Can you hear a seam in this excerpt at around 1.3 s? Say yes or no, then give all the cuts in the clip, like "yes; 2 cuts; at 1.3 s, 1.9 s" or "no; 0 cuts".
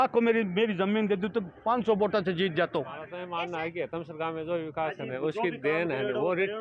no; 1 cut; at 3.2 s